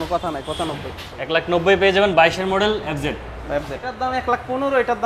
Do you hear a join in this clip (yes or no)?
yes